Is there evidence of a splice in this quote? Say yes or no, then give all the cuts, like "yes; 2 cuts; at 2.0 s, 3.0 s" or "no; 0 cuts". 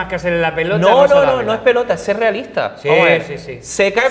no; 0 cuts